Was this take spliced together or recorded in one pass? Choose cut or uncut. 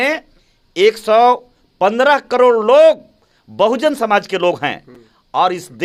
uncut